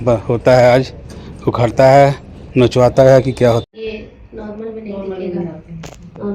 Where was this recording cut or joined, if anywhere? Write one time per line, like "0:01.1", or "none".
0:03.6